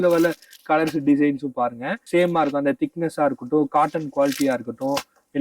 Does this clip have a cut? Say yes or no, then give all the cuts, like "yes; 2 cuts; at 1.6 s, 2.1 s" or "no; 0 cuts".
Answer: yes; 1 cut; at 1.9 s